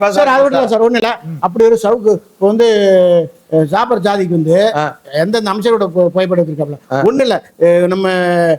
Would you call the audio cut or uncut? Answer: uncut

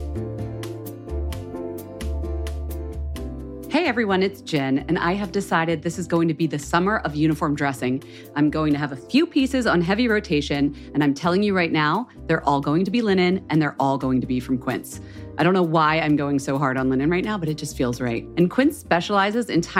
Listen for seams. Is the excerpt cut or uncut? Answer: cut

